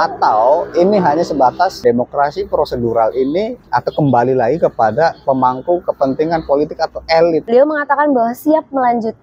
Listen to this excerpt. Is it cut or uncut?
cut